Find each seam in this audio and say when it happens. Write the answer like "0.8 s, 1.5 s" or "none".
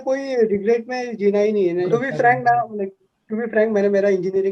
1.9 s